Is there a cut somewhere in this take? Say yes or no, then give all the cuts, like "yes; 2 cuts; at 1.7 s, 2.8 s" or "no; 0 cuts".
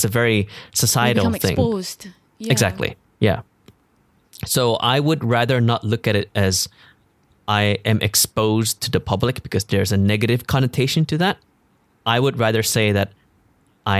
no; 0 cuts